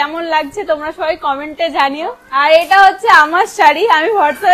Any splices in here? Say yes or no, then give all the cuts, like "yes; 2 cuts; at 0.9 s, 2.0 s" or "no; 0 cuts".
yes; 1 cut; at 2.2 s